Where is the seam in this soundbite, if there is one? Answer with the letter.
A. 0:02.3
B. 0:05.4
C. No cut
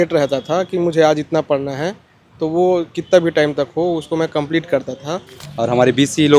B